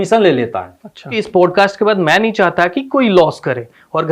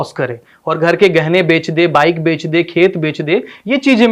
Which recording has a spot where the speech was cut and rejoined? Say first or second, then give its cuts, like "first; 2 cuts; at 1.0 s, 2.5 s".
first; 1 cut; at 1.2 s